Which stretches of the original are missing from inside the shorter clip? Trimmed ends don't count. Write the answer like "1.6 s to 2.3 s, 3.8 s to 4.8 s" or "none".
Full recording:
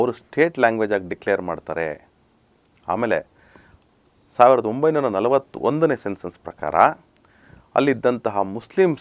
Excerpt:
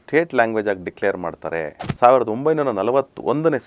2.1 s to 4.2 s

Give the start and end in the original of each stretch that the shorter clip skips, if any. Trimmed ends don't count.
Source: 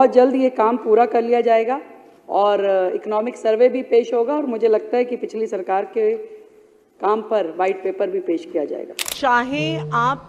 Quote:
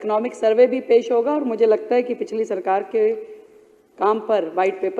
none

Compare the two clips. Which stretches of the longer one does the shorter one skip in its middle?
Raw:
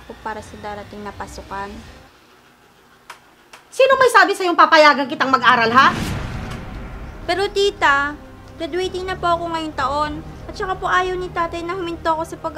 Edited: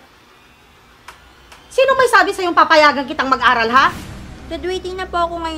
6.1 s to 8.2 s

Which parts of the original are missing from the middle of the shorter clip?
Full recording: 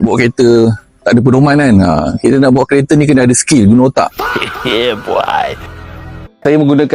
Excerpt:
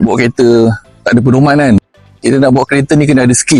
none

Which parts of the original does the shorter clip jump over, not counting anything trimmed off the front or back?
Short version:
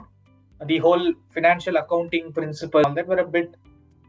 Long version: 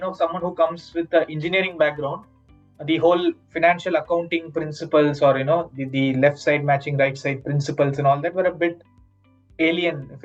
5.0 s to 8.1 s

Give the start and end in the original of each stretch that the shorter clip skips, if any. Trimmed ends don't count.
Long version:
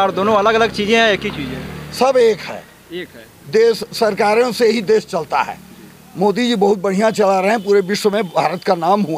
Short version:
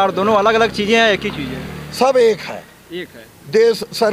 none

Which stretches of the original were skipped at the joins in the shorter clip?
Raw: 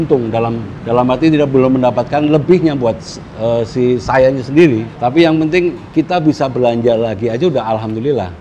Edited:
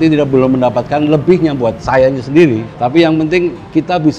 3.0 s to 4.0 s

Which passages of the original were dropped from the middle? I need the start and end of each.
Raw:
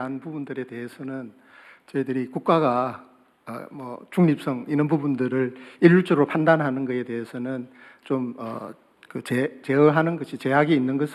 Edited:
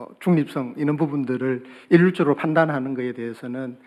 none

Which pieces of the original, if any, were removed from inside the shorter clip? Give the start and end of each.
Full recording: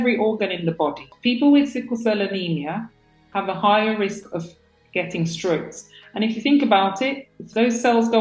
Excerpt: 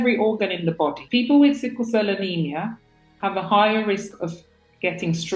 1.0 s to 1.1 s

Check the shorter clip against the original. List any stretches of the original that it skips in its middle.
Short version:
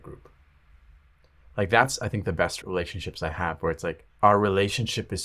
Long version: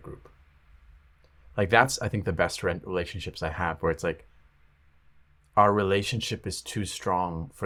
2.6 s to 2.8 s, 4.3 s to 5.4 s

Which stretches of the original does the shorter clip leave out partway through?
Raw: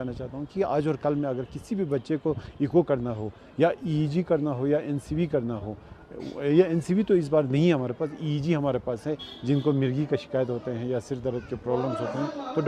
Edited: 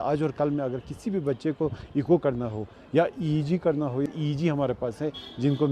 4.7 s to 8.1 s

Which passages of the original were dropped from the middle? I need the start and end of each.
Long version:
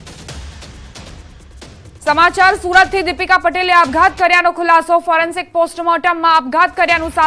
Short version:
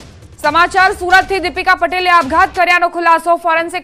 none

